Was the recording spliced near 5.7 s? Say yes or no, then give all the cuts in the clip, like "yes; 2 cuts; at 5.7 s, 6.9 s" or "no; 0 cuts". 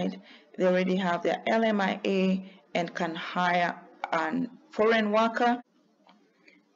yes; 1 cut; at 5.7 s